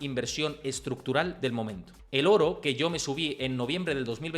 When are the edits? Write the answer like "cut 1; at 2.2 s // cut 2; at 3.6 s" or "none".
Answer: cut 1; at 1.8 s